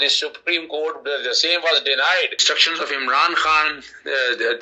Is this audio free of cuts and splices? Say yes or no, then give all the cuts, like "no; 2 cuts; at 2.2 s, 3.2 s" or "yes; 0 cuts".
no; 1 cut; at 2.4 s